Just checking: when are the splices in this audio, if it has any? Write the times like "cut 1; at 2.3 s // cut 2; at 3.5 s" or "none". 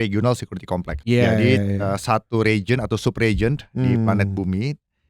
cut 1; at 0.9 s